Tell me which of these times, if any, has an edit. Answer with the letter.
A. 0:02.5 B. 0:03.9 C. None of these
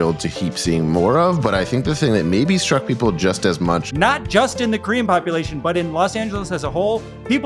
B